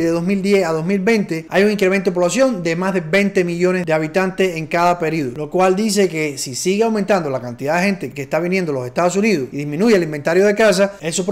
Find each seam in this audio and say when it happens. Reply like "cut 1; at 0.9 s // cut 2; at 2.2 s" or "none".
none

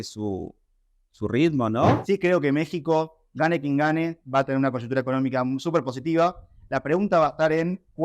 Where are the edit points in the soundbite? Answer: cut 1; at 2.0 s

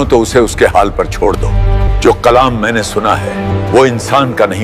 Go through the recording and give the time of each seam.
cut 1; at 1.9 s // cut 2; at 3.5 s

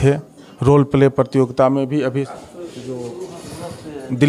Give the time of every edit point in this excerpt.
cut 1; at 2.4 s

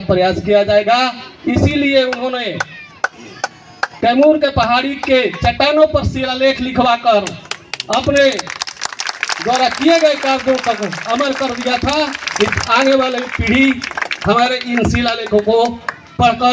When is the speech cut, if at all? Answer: none

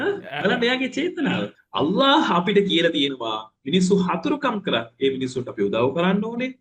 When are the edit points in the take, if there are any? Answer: cut 1; at 1.6 s

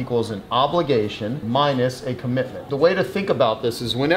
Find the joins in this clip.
none

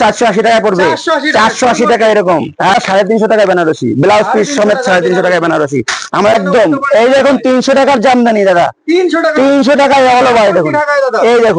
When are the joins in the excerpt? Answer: cut 1; at 2.7 s // cut 2; at 6.4 s

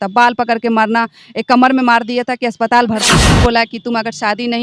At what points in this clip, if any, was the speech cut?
cut 1; at 3.1 s

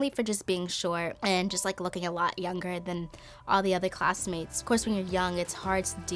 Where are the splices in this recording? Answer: cut 1; at 1.2 s // cut 2; at 4.6 s

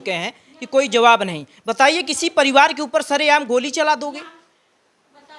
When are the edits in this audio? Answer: none

